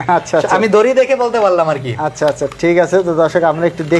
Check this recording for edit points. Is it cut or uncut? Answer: uncut